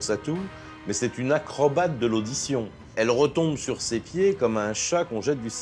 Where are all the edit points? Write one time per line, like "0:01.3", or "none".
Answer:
0:02.9